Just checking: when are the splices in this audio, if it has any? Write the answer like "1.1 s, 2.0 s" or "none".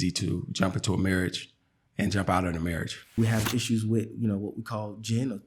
3.2 s